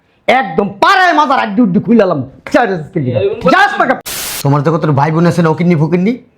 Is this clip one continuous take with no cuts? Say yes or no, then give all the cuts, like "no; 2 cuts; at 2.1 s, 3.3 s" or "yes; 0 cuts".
no; 1 cut; at 4.1 s